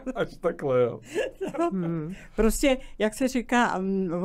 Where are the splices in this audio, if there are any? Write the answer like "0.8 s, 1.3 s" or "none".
none